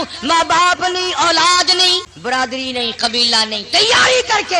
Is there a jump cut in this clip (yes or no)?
yes